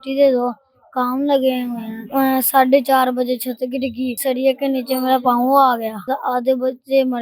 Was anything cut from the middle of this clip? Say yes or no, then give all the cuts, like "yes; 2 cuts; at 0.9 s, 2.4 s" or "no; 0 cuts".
yes; 3 cuts; at 2.1 s, 4.2 s, 6.1 s